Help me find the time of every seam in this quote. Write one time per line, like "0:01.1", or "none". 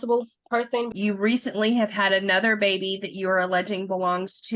0:00.9

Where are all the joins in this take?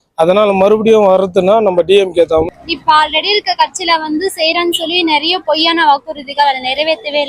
0:02.6

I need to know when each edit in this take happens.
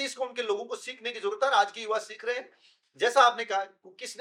none

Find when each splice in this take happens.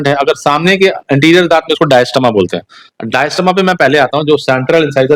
none

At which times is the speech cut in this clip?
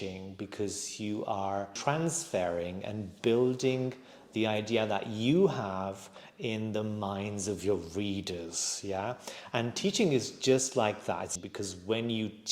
0:01.8
0:11.3

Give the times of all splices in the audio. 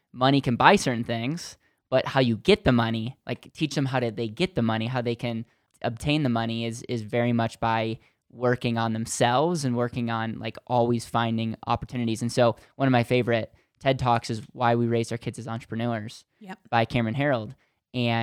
0:05.6

